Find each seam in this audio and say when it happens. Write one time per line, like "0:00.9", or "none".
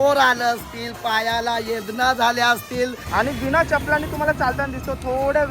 0:03.0